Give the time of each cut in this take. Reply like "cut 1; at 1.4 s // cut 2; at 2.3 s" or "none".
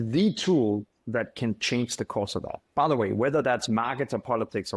none